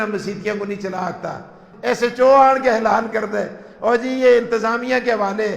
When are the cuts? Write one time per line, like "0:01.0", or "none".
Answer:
0:01.6